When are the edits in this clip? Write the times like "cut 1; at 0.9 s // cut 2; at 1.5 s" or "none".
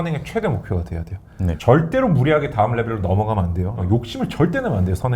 cut 1; at 1.6 s // cut 2; at 3.8 s